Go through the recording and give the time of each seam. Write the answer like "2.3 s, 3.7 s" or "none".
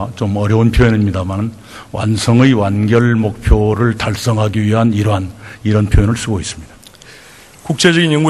2.3 s